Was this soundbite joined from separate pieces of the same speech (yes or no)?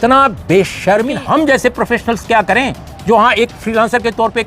yes